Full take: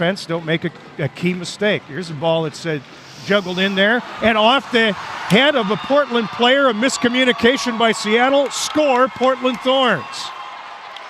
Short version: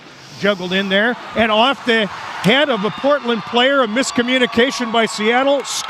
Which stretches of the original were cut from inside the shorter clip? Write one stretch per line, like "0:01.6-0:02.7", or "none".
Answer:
none